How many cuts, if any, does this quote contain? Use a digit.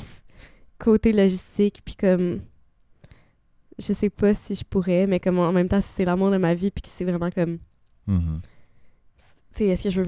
0